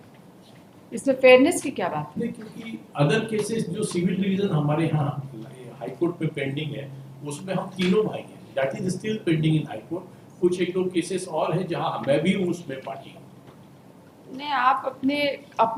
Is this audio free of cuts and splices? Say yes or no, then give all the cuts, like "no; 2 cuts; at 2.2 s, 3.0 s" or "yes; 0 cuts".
yes; 0 cuts